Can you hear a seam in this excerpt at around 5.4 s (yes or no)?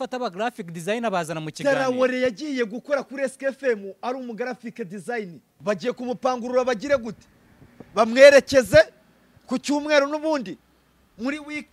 yes